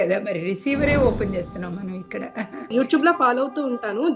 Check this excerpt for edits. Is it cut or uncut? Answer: cut